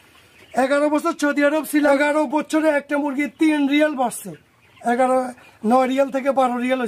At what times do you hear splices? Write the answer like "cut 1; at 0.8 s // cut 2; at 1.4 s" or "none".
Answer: cut 1; at 1.9 s